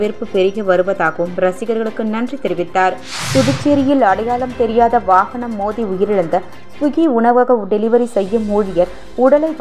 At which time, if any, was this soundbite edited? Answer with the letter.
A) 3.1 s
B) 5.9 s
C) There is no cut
A